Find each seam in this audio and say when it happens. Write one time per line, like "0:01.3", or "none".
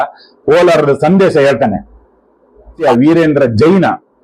0:02.8

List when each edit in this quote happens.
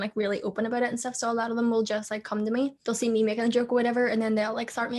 0:02.8

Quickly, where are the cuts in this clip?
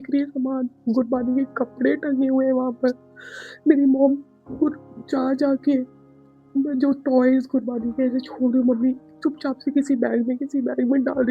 none

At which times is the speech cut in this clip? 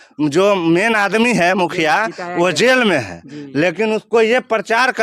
none

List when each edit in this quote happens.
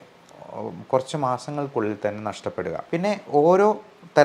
0:02.8

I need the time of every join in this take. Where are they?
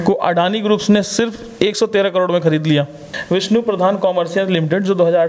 0:03.1

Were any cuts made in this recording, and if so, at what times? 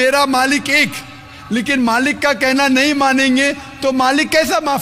none

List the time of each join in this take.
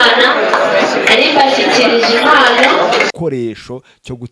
0:03.1

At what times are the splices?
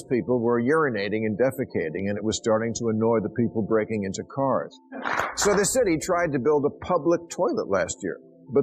0:05.0

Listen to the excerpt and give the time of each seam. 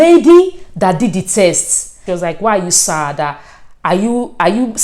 0:02.0

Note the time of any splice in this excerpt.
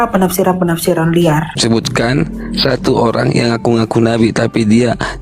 0:01.5

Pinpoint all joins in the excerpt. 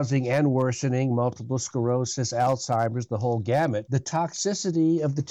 0:03.9

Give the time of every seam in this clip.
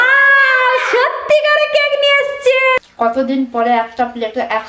0:02.8

